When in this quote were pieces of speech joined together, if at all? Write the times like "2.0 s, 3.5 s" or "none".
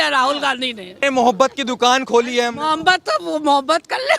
1.0 s